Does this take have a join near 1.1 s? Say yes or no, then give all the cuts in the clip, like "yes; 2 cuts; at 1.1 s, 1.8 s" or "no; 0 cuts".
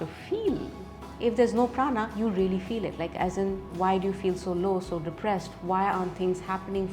yes; 1 cut; at 1.1 s